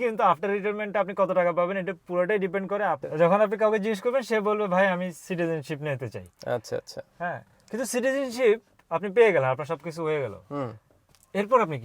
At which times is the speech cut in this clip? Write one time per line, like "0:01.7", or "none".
0:03.0